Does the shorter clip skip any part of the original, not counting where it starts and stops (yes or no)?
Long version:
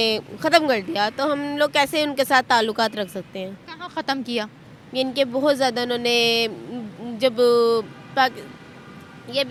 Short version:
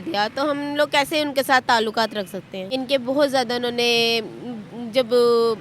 yes